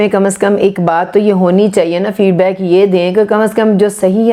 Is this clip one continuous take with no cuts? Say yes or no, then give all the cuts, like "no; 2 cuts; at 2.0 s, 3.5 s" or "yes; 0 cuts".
yes; 0 cuts